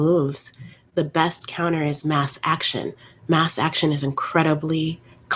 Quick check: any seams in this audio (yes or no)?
no